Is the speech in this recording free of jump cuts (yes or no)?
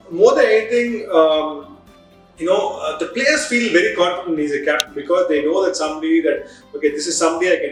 yes